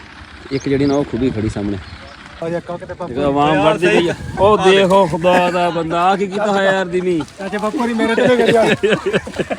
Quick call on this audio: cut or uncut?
cut